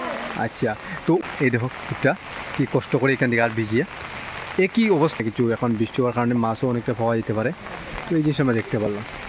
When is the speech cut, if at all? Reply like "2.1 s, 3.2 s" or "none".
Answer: 1.2 s, 5.2 s